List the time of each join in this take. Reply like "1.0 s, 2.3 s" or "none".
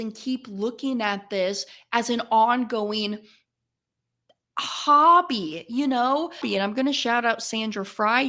6.4 s